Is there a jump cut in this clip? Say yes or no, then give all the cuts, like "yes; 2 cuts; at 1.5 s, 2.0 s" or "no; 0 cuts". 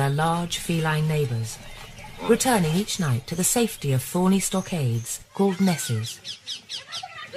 no; 0 cuts